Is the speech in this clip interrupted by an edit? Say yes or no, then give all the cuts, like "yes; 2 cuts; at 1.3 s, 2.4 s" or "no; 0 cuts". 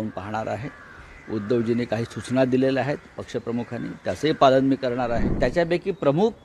yes; 1 cut; at 5.3 s